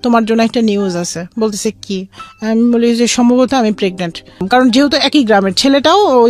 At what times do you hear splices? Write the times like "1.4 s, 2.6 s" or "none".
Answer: 4.4 s

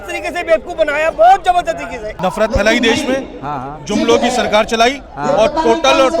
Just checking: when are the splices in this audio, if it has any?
2.1 s

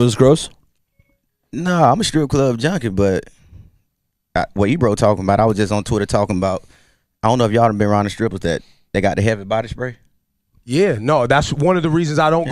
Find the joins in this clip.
6.7 s

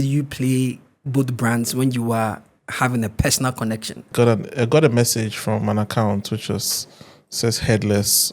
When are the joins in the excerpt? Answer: 4.1 s

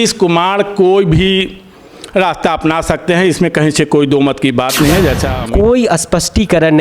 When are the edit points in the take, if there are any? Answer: 5.3 s

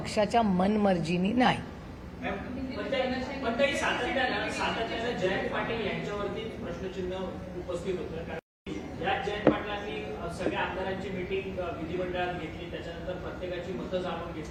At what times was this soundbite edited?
none

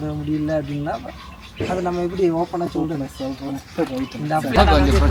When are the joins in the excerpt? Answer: none

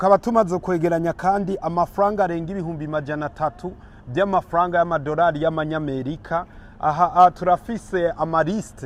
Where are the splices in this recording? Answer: none

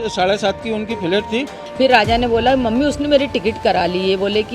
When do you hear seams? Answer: 1.6 s

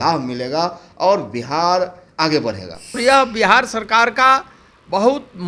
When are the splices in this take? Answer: 3.0 s

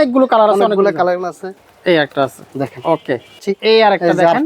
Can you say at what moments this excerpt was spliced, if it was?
1.5 s, 3.3 s

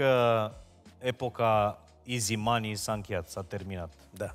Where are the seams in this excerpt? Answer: none

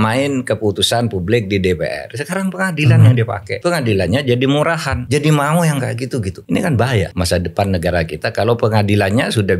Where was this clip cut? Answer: 3.5 s, 4.9 s, 6.4 s, 7.1 s

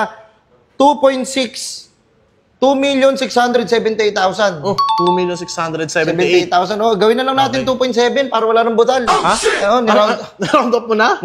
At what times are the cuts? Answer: none

